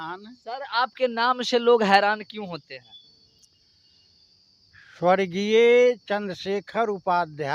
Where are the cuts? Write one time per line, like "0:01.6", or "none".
none